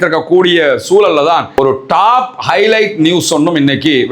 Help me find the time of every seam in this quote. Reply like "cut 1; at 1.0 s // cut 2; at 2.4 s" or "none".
cut 1; at 1.5 s